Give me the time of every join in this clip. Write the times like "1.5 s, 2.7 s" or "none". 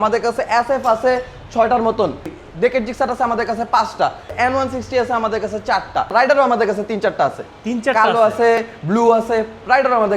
2.4 s, 4.3 s, 6.4 s